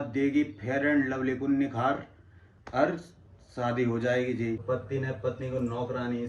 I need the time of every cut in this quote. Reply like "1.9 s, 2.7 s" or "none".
4.6 s